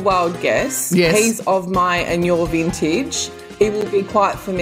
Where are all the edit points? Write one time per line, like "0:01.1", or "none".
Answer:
0:01.1